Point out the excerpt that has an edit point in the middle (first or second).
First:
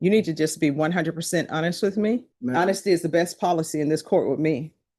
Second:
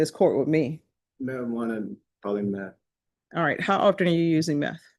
first